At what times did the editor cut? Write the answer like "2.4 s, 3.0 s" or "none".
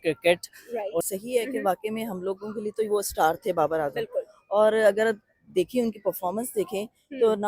1.0 s